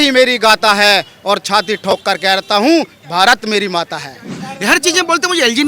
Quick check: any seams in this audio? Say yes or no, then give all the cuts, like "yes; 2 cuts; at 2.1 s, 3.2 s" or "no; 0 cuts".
yes; 1 cut; at 4.5 s